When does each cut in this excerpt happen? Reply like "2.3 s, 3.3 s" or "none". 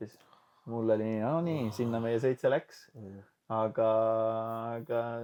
none